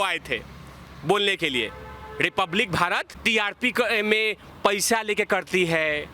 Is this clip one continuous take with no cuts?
no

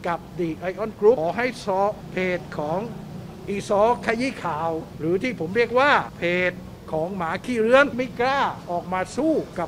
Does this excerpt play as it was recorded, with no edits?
no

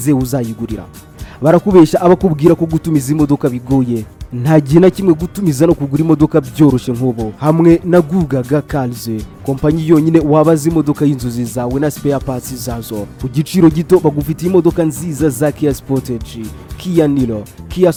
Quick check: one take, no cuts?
yes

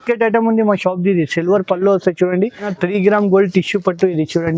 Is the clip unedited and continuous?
no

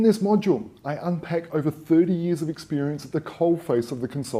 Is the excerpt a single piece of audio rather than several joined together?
no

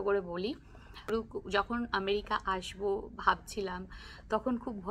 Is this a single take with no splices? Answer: no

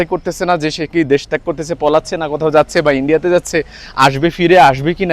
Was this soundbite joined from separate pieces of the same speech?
no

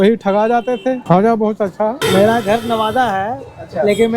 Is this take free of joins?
no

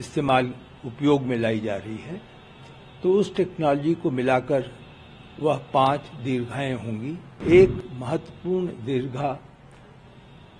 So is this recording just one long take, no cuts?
no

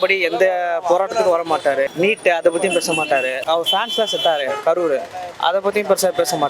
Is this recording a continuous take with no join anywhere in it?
no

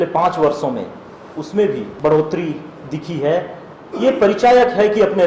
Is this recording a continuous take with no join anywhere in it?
no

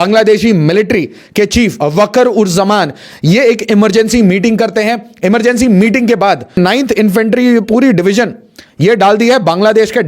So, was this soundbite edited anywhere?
yes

